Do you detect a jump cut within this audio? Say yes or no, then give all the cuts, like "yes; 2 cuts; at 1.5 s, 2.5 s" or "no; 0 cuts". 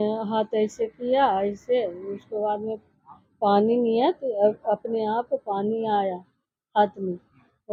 no; 0 cuts